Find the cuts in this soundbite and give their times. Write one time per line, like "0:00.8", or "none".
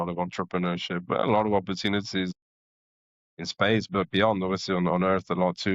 none